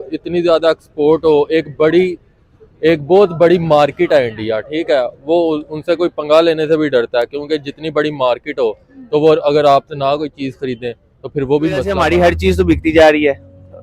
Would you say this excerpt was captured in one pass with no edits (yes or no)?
no